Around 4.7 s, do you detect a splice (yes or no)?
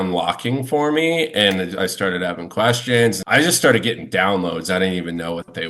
no